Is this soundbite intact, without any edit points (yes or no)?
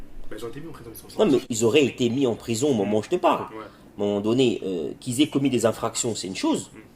no